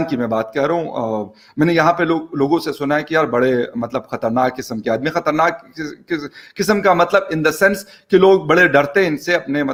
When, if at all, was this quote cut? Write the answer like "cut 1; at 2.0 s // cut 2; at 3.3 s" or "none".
none